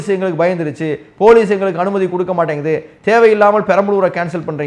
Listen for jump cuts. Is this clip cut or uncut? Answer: uncut